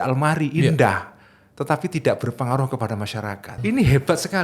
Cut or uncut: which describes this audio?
cut